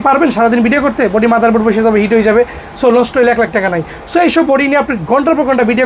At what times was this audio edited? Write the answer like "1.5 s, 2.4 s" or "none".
none